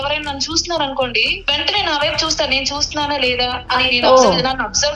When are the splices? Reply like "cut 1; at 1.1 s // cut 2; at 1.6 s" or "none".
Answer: cut 1; at 1.3 s